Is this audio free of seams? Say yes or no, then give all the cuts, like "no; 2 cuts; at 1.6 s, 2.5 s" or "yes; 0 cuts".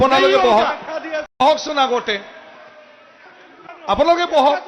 no; 1 cut; at 1.5 s